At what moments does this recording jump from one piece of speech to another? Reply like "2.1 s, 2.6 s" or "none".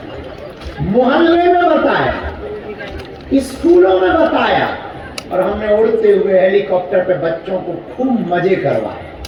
none